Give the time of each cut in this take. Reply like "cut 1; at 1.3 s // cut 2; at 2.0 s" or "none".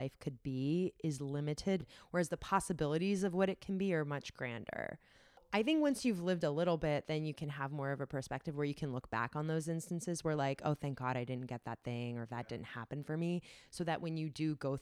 cut 1; at 1.8 s // cut 2; at 5.4 s